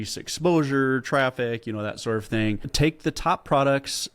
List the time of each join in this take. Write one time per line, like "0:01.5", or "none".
0:02.7